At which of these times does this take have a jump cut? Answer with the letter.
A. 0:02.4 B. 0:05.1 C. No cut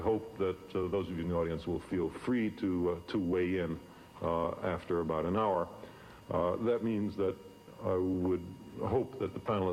A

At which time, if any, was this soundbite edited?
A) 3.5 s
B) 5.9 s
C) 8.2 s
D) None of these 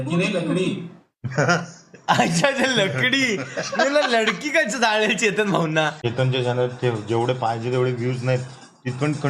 B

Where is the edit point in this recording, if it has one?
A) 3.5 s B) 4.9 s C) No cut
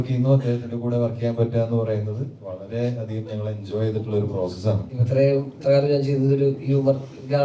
B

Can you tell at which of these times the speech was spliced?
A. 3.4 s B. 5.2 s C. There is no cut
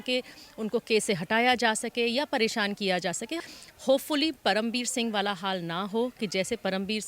A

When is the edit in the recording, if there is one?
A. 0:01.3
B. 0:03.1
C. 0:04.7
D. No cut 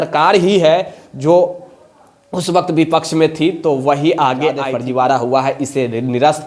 C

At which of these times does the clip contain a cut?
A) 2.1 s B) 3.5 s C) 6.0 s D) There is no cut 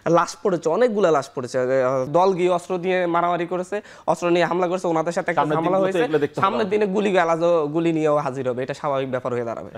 A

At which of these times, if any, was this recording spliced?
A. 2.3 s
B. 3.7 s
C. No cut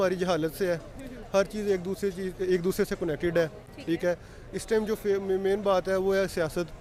C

